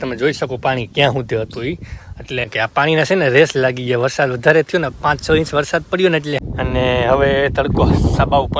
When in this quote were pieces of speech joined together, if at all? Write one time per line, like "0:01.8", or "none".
0:02.4
0:06.4

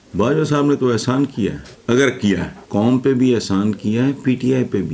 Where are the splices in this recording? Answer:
0:01.7
0:02.6

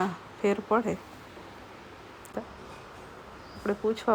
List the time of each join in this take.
0:02.3

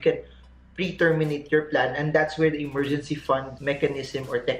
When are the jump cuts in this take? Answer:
0:03.5

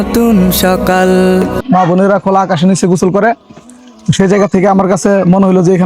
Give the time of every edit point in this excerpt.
0:01.6

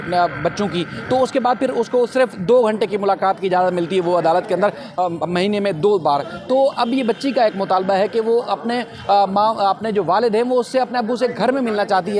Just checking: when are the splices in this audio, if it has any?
none

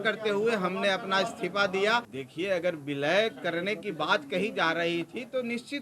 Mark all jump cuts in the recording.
0:02.1

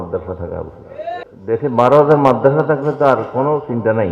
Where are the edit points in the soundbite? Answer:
0:01.2

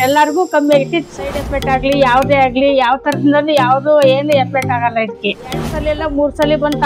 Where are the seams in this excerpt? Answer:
0:01.1
0:05.8

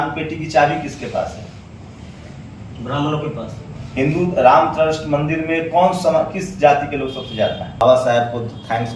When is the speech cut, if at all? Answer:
0:07.8

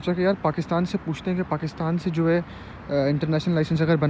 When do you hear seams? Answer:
none

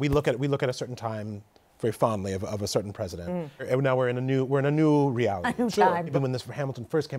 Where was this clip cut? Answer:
0:03.7
0:06.1

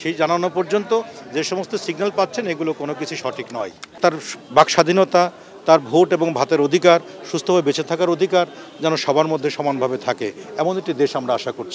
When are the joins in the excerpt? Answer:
0:04.0

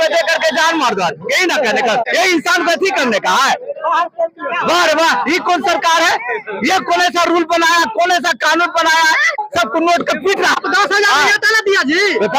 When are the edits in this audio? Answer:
0:02.1
0:09.4
0:10.6

